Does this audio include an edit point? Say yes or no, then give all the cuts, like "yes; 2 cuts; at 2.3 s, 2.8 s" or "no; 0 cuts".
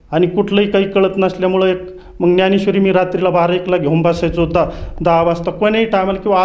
no; 0 cuts